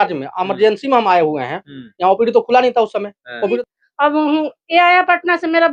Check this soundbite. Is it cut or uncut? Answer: cut